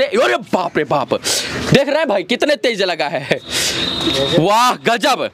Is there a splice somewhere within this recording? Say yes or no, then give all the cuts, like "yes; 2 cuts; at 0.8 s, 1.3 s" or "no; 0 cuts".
no; 0 cuts